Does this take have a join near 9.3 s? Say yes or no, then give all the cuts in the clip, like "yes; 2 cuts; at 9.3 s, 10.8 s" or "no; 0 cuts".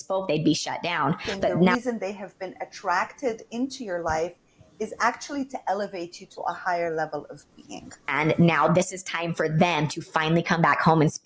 no; 2 cuts; at 1.7 s, 8.1 s